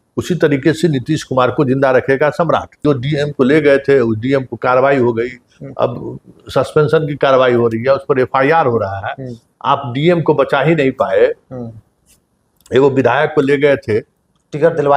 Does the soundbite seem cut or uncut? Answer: cut